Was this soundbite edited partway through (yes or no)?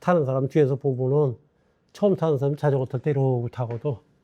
no